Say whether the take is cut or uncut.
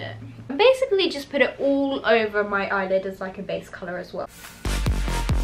cut